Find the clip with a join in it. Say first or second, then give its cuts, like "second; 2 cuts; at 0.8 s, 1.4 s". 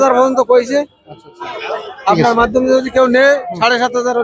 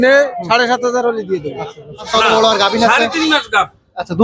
second; 1 cut; at 2.1 s